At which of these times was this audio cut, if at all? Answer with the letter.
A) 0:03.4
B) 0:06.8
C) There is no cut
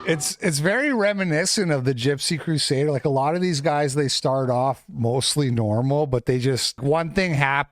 B